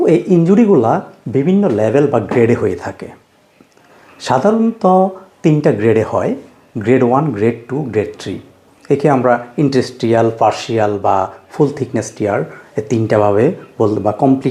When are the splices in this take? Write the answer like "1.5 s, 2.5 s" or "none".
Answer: none